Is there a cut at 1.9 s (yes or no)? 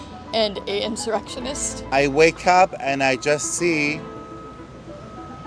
yes